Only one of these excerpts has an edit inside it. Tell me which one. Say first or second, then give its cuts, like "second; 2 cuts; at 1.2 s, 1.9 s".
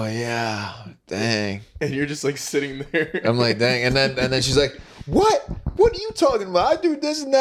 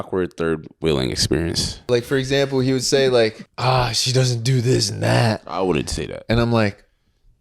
second; 2 cuts; at 1.8 s, 3.5 s